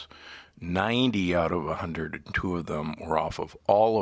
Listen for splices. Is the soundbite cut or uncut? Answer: uncut